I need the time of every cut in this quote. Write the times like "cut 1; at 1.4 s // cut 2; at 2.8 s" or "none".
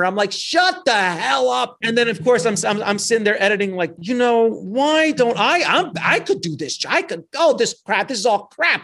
cut 1; at 1.7 s // cut 2; at 4.0 s